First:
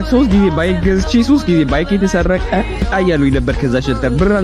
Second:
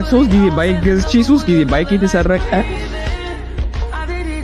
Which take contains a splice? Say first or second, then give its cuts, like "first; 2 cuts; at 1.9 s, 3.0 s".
first; 1 cut; at 2.8 s